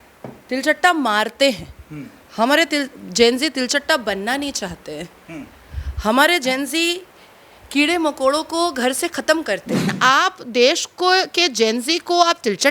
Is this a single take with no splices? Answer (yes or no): no